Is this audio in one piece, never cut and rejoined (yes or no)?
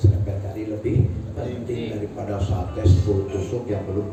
yes